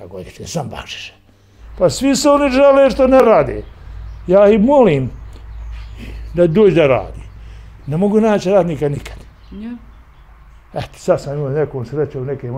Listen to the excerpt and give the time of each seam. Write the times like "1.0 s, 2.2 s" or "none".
1.6 s

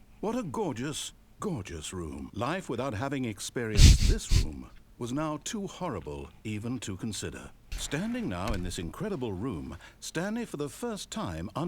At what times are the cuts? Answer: 2.2 s, 7.8 s

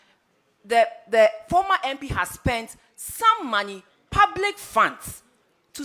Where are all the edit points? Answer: none

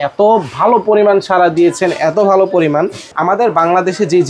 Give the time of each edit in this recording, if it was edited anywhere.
3.0 s

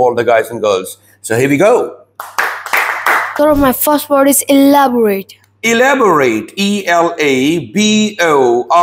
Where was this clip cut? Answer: 3.3 s

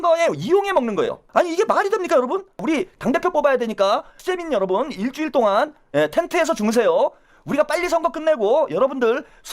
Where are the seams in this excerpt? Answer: 1.2 s, 2.6 s, 4.2 s

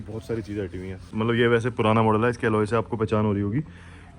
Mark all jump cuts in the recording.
1.1 s

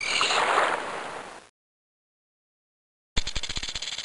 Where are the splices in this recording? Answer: 1.0 s

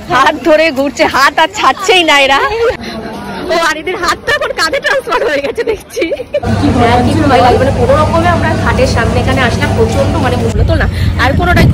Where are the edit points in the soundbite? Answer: 2.8 s, 6.5 s, 10.5 s

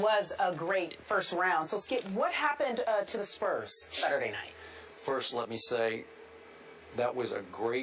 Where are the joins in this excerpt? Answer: 1.1 s

